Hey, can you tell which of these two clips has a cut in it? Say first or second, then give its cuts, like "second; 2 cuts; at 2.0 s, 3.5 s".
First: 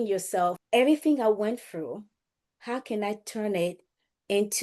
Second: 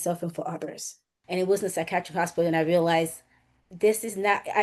second; 1 cut; at 1.1 s